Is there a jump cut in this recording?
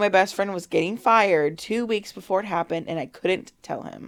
no; 0 cuts

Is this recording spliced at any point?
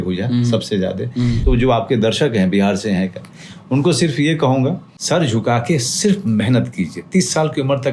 yes; 2 cuts; at 1.4 s, 4.9 s

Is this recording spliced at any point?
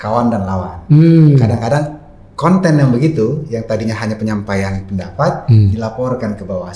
no; 0 cuts

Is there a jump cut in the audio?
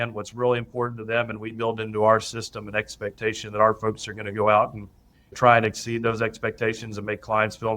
no; 0 cuts

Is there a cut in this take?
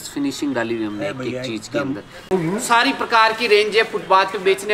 yes; 1 cut; at 2.3 s

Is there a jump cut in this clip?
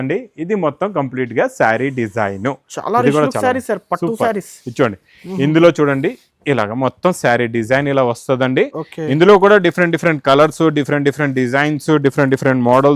no; 0 cuts

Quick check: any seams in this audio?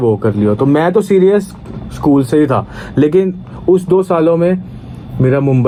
no; 0 cuts

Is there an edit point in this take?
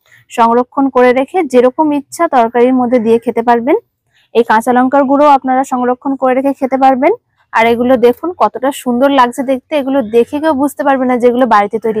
yes; 2 cuts; at 4.1 s, 7.4 s

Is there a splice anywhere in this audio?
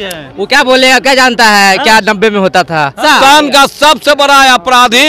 yes; 1 cut; at 3.0 s

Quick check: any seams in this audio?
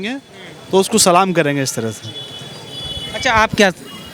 no; 0 cuts

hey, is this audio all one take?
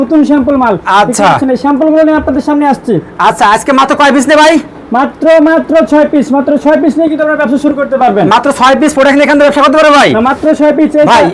yes; 0 cuts

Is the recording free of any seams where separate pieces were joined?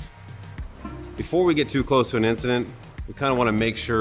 no; 1 cut; at 1.2 s

